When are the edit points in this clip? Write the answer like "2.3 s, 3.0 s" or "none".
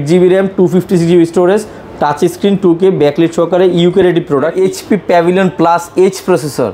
4.5 s